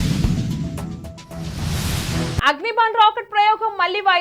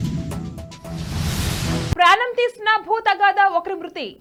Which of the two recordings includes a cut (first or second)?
first